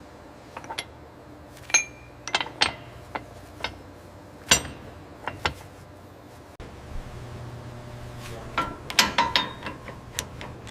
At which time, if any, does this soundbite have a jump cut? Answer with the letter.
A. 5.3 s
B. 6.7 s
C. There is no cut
B